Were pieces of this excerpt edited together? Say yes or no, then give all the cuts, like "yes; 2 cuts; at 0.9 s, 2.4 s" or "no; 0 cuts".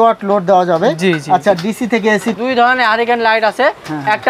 yes; 1 cut; at 2.3 s